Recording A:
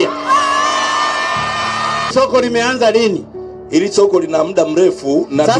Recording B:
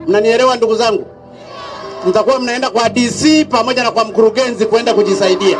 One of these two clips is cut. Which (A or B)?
A